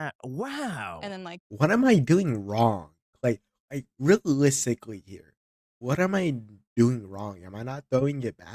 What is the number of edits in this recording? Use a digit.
1